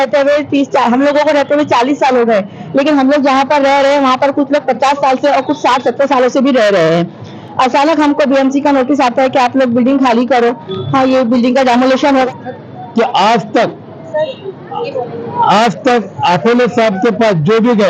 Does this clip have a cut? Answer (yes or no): yes